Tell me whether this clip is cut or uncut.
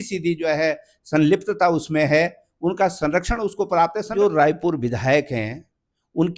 cut